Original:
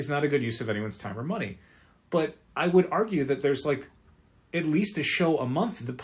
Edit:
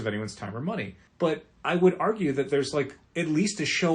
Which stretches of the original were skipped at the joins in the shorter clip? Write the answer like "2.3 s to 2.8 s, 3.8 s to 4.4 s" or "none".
1.6 s to 1.9 s, 3.9 s to 4.4 s

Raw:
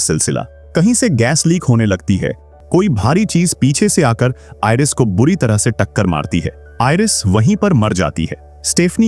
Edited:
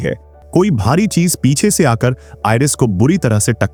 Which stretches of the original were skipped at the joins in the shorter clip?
none

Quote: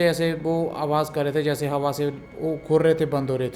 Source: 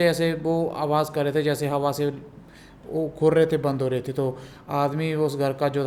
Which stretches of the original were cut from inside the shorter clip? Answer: 2.3 s to 2.8 s

